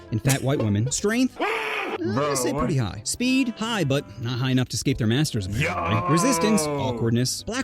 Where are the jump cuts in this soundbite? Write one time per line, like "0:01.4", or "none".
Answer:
0:00.9